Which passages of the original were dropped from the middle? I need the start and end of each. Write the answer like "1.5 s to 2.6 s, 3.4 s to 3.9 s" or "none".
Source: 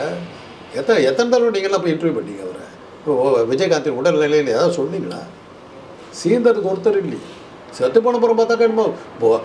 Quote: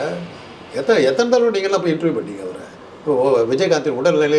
none